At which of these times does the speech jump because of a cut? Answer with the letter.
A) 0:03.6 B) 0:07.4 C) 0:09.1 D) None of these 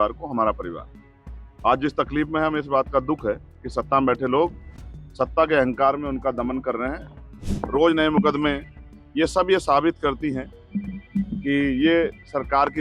B